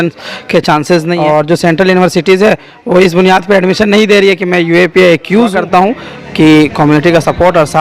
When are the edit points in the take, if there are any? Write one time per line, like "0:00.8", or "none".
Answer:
0:01.2
0:05.5